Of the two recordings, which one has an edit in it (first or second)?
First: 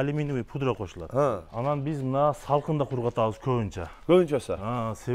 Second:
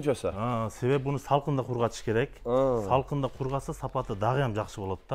first